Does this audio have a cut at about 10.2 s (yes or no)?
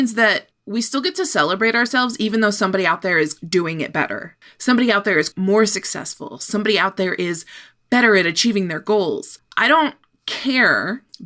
no